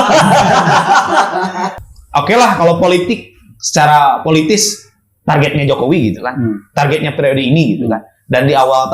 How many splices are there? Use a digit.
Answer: 1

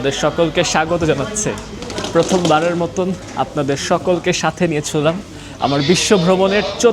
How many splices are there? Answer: 0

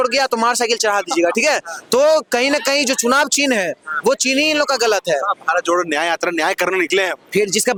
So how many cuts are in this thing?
0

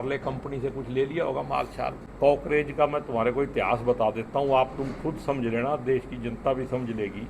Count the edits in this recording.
1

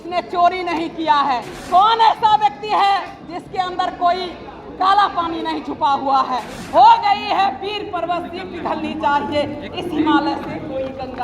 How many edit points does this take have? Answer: 2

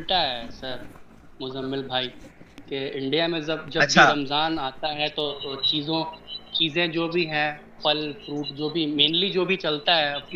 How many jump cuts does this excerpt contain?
0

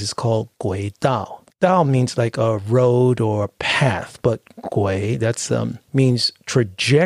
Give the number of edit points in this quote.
2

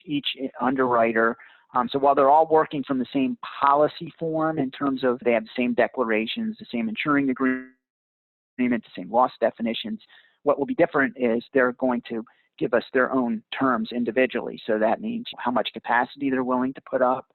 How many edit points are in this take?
2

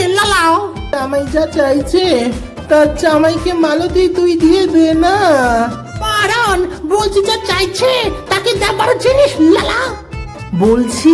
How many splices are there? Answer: 1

